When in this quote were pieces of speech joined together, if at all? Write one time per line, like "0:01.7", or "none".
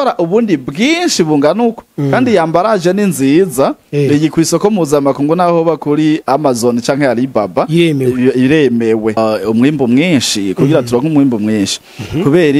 0:09.2